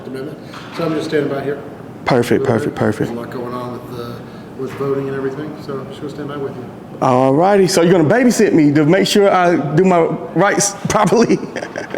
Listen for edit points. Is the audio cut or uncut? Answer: uncut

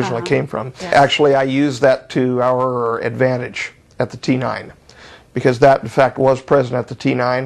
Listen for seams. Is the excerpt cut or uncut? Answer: cut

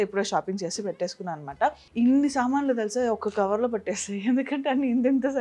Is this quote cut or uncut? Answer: cut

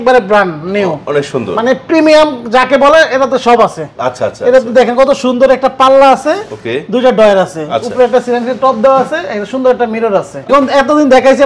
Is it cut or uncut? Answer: cut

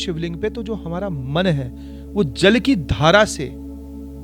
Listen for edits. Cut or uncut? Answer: uncut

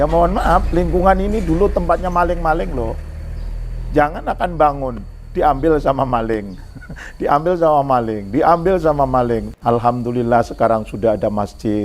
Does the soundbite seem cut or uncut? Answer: cut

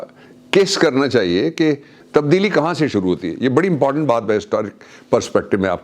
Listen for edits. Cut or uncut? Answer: cut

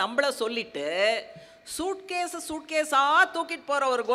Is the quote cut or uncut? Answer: uncut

